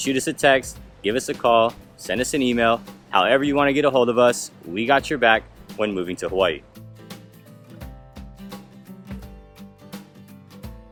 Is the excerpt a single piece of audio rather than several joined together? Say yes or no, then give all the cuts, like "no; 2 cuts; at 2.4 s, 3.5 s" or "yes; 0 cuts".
yes; 0 cuts